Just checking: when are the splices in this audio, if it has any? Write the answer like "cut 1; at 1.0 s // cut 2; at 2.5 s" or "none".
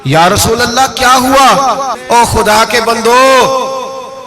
cut 1; at 1.9 s